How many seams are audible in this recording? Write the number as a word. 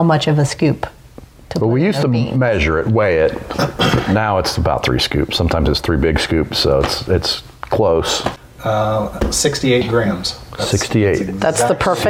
one